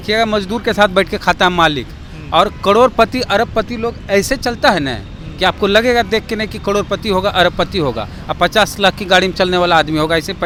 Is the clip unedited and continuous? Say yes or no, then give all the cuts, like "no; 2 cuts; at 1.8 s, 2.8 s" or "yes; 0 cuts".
yes; 0 cuts